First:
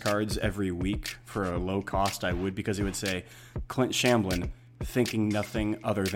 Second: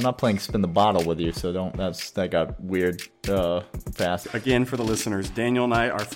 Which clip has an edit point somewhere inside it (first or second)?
second